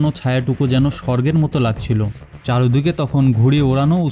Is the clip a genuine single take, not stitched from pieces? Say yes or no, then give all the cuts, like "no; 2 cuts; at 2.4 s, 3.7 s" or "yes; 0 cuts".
no; 1 cut; at 2.1 s